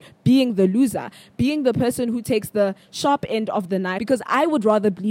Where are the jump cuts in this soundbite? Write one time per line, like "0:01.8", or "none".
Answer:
0:04.0